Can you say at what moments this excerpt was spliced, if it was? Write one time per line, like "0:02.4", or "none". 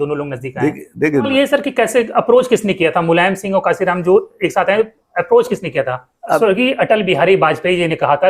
0:01.3
0:06.4